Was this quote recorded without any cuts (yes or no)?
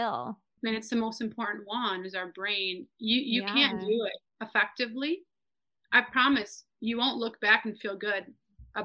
yes